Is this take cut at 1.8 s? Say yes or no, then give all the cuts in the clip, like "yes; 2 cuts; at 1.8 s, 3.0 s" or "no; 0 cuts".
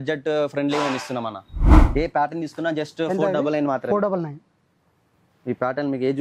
yes; 1 cut; at 1.8 s